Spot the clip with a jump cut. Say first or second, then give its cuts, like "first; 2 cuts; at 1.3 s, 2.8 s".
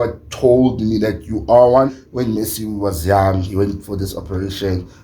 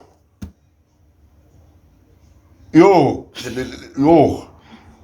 first; 1 cut; at 2.0 s